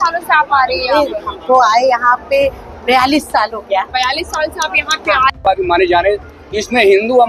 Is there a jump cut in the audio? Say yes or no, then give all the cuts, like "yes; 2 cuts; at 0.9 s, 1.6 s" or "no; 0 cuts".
yes; 1 cut; at 5.4 s